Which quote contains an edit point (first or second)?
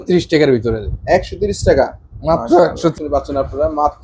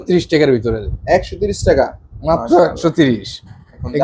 first